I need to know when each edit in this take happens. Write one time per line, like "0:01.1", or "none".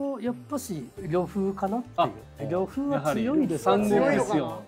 0:00.9
0:02.4

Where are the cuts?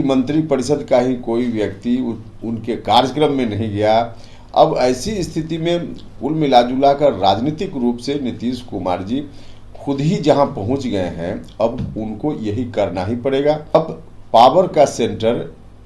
0:13.7

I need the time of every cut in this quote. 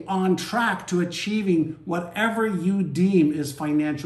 none

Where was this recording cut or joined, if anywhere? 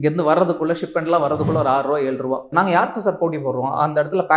0:02.5

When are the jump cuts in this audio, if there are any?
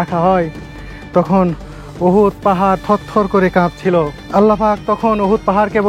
0:04.2

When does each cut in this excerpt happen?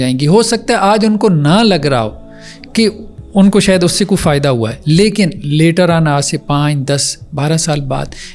none

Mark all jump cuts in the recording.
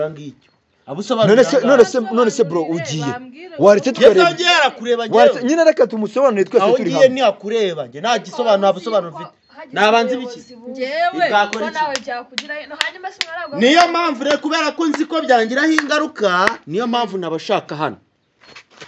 none

